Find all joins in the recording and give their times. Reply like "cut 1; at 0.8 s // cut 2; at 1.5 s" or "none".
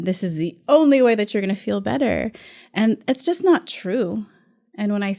none